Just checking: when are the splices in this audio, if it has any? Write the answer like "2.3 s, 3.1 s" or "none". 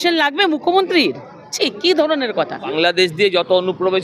2.7 s